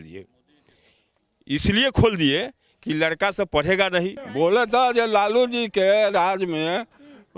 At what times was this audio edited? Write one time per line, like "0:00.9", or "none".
0:04.2

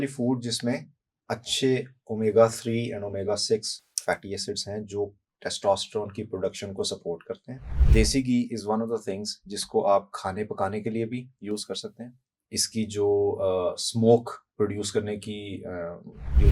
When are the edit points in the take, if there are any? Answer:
0:07.8

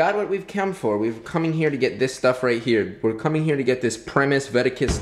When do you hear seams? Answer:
none

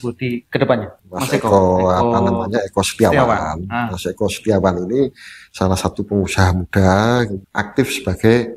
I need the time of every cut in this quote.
0:01.1
0:07.4

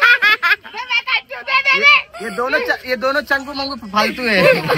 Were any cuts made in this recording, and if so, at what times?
none

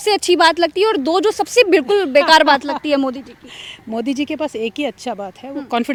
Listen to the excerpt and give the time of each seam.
none

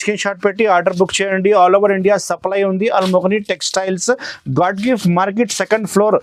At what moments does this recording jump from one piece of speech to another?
none

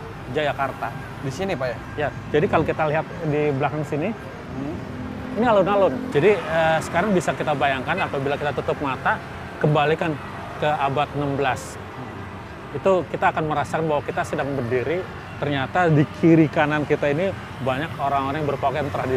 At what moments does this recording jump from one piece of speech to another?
0:06.0

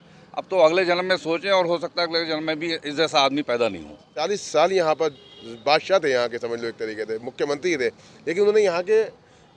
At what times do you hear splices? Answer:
0:04.2

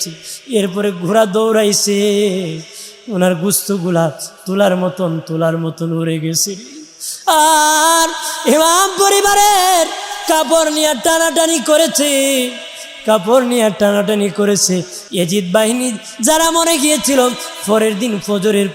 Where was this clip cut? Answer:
0:15.0

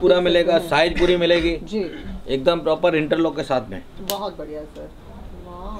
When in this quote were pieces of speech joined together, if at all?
none

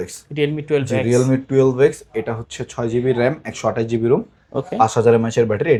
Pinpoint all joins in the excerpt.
none

